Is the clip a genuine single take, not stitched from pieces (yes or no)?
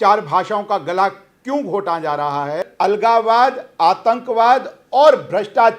no